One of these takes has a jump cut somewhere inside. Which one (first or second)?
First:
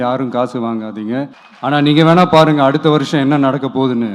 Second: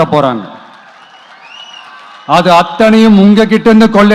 first